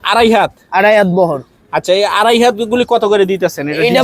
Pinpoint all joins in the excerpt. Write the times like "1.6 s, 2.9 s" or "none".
none